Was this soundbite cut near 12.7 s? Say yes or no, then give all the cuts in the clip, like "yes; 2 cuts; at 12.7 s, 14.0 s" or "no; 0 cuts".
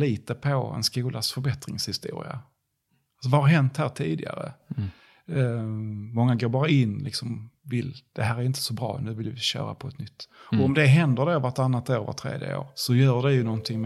yes; 1 cut; at 12.7 s